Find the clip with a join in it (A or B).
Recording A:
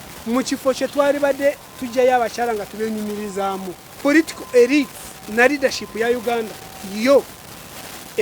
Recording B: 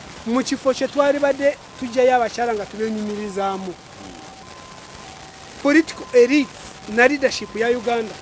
A